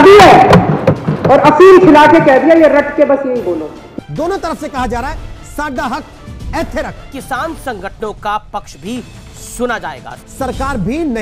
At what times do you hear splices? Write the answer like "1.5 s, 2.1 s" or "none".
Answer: 3.8 s